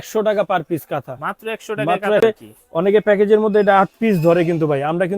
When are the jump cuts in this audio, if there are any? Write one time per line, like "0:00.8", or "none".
0:02.2

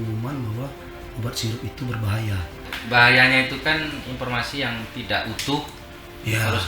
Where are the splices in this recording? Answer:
0:02.7

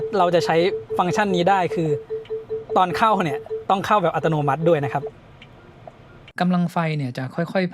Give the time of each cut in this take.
0:06.2

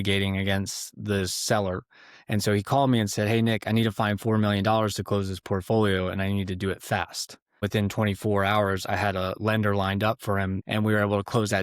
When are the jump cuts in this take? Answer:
0:07.7
0:10.6

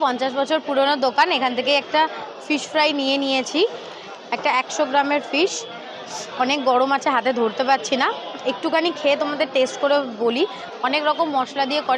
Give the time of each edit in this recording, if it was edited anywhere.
none

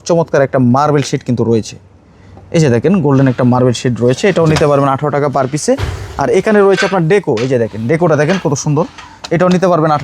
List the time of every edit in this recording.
none

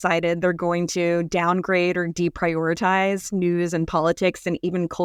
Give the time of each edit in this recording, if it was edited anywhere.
none

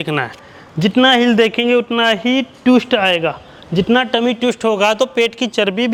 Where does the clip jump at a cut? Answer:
none

